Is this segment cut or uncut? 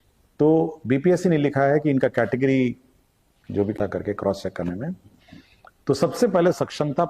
cut